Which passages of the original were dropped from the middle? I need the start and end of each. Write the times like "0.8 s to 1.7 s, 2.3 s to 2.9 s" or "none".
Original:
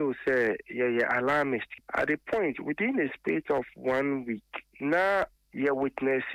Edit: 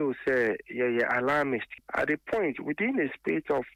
none